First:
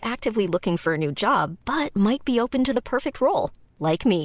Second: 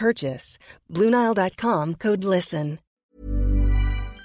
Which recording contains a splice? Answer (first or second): second